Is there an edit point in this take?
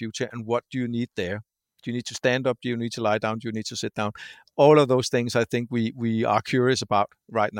no; 0 cuts

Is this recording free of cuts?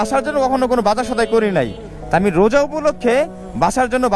yes; 0 cuts

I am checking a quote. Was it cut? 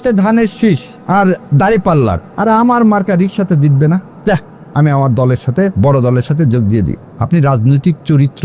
yes; 4 cuts; at 0.9 s, 2.3 s, 4.1 s, 7.1 s

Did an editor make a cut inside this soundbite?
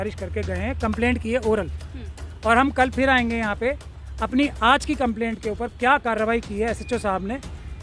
no; 0 cuts

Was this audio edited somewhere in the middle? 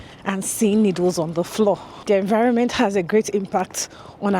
yes; 1 cut; at 1.9 s

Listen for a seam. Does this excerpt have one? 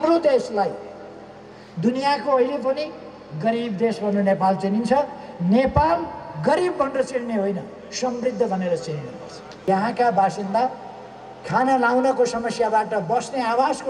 yes; 1 cut; at 9.6 s

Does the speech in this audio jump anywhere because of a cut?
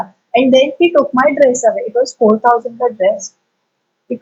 no; 0 cuts

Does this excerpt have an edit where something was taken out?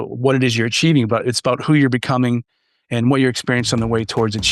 no; 0 cuts

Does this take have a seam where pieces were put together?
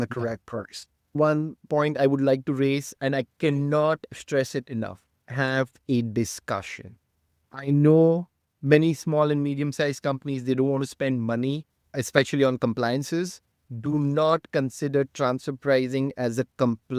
yes; 3 cuts; at 1.1 s, 5.2 s, 11.8 s

